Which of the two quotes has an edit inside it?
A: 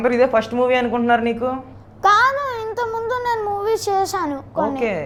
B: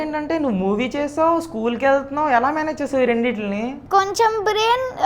B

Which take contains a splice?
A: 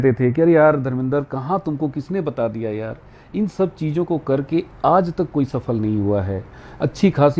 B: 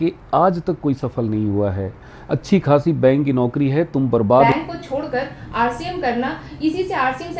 B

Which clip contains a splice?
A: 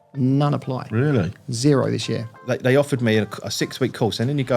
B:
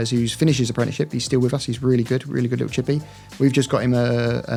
A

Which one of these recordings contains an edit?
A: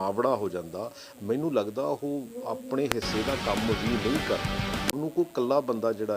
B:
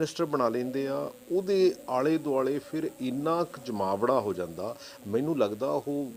A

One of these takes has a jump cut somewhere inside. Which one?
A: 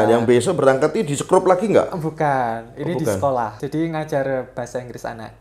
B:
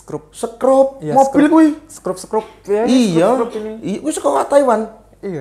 A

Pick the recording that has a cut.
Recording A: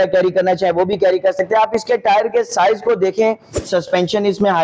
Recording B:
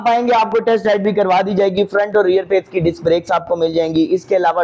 A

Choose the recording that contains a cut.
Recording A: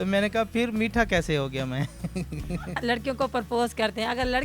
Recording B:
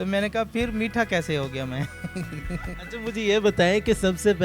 A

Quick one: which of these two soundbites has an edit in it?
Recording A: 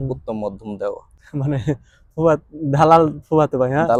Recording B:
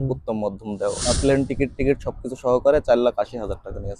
B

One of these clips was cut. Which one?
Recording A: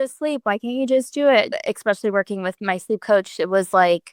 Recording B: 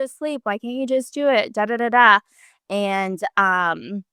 A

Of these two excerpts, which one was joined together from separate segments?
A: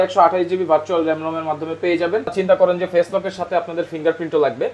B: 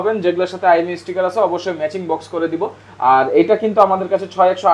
A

